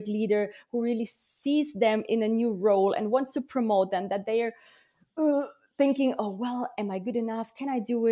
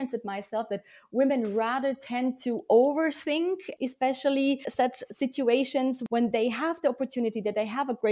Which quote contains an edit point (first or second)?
second